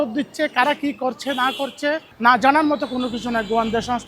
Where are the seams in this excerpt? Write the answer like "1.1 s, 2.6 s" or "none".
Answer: 2.1 s

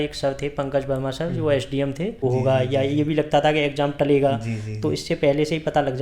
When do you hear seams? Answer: 2.2 s

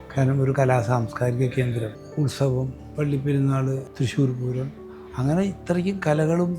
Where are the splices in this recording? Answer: 2.0 s, 2.9 s, 3.9 s

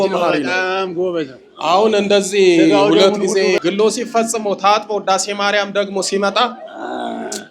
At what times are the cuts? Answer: 3.6 s

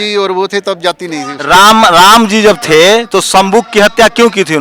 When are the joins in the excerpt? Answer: none

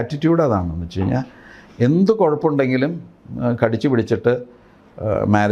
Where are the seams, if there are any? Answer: none

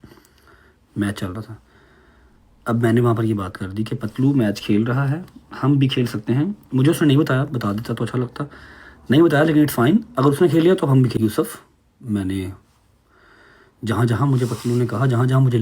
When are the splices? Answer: 11.2 s

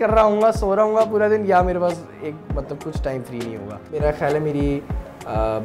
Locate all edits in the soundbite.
4.0 s

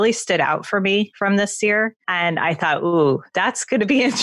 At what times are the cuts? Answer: 1.1 s, 2.0 s

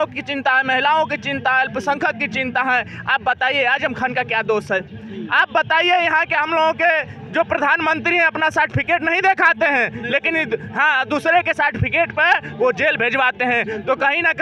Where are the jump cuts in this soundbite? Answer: none

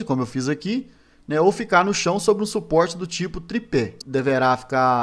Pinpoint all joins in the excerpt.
4.0 s

